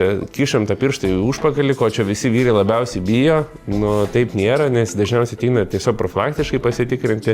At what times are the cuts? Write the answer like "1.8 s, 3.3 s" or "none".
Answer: none